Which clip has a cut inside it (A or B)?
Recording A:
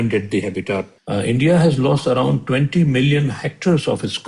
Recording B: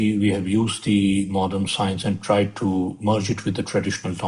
A